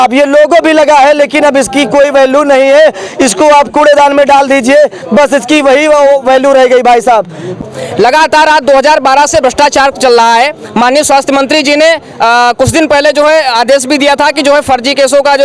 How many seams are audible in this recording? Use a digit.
1